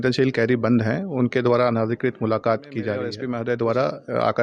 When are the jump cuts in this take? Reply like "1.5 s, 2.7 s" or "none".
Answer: 3.2 s